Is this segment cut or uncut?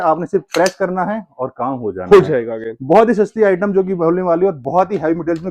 uncut